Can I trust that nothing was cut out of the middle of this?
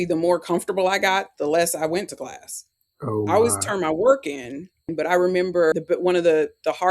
no; 2 cuts; at 4.9 s, 5.8 s

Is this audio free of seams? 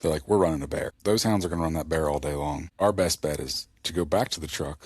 no; 2 cuts; at 0.9 s, 2.7 s

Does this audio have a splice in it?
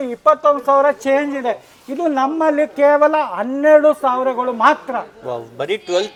no; 0 cuts

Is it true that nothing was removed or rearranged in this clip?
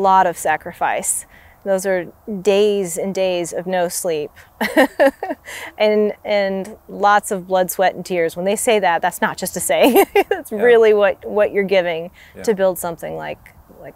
yes; 0 cuts

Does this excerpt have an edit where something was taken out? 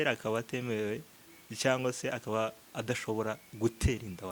no; 0 cuts

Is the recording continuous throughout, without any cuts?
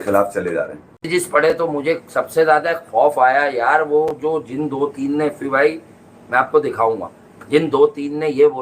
no; 1 cut; at 1.0 s

